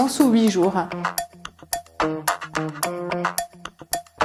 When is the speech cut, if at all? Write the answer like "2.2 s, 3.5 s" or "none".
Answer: 0.9 s